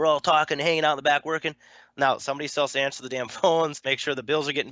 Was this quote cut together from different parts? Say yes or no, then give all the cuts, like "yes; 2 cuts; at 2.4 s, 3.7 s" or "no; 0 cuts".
yes; 1 cut; at 3.8 s